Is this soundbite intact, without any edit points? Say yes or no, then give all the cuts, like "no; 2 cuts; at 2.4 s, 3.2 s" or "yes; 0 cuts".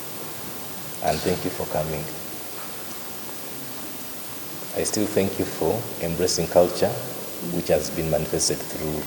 yes; 0 cuts